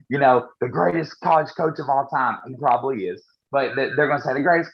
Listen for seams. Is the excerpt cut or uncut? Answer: uncut